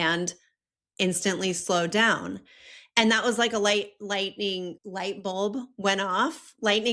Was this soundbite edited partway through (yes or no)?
no